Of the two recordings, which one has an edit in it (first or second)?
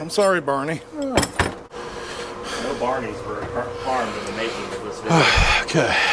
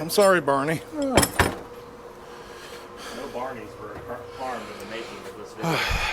first